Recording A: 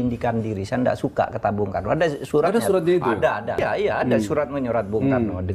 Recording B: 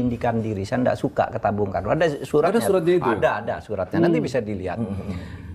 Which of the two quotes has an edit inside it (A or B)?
A